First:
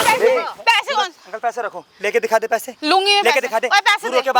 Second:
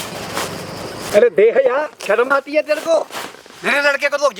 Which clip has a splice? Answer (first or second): second